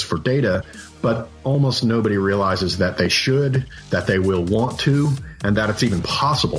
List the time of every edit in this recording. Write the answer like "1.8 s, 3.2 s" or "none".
none